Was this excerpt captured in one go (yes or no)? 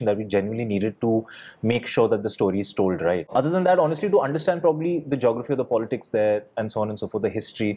yes